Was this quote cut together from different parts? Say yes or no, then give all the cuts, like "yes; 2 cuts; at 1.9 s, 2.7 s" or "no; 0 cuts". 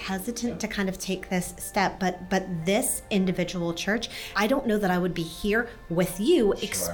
yes; 1 cut; at 4.3 s